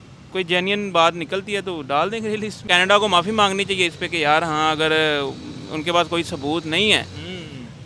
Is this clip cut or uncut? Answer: cut